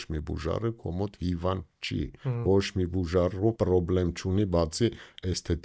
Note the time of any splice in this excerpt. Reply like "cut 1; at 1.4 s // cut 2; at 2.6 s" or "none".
cut 1; at 2.2 s // cut 2; at 3.6 s